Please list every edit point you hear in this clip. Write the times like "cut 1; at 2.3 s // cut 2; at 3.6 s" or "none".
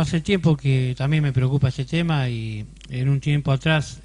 cut 1; at 2.5 s